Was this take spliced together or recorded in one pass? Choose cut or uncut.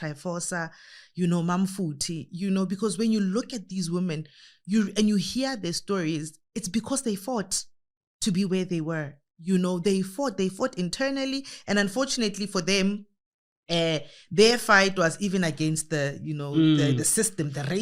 uncut